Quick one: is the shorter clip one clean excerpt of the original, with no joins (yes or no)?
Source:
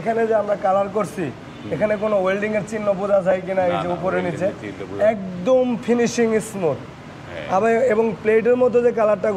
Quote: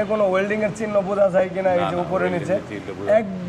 yes